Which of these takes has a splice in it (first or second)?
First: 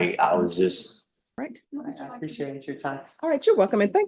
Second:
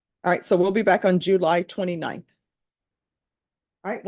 first